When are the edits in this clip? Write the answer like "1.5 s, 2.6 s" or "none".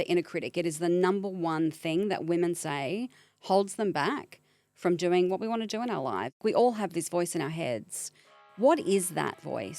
6.4 s, 8.4 s